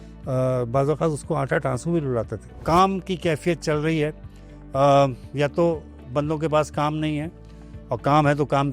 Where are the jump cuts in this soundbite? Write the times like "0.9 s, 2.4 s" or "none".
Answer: 2.6 s

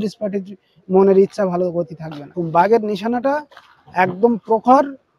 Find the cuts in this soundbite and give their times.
2.4 s

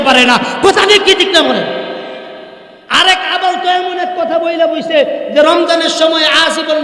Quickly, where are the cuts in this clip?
none

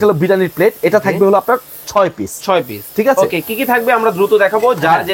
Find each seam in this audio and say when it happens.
none

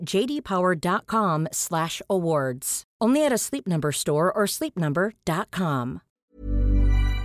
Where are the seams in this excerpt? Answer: 6.2 s

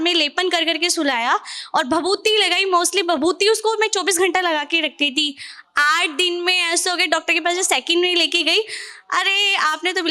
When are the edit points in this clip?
none

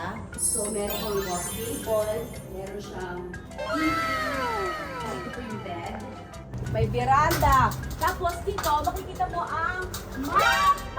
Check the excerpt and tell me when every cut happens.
6.6 s

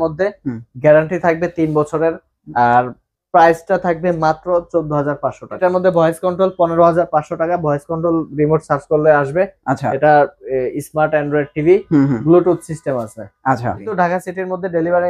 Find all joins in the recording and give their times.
5.6 s, 13.9 s

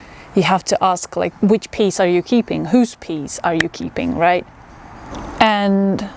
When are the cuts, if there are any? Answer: none

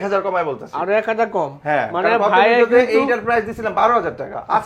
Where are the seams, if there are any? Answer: none

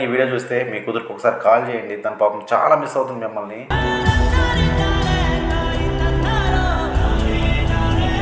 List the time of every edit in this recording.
none

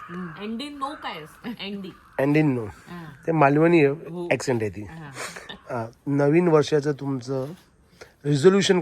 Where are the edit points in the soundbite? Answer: none

